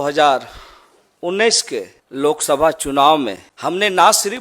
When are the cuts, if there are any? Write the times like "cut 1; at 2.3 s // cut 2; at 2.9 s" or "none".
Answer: cut 1; at 2.0 s // cut 2; at 3.5 s